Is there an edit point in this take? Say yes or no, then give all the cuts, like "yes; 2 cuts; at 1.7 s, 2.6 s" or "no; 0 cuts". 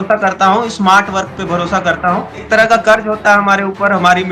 yes; 1 cut; at 2.4 s